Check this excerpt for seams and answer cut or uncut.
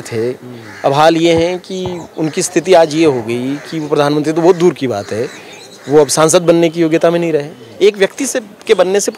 cut